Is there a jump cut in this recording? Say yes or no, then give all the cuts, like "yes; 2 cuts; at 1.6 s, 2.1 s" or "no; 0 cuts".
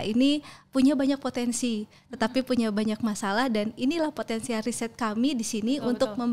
no; 0 cuts